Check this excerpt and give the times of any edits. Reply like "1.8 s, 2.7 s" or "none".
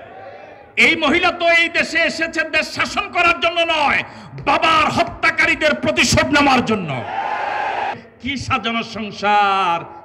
8.0 s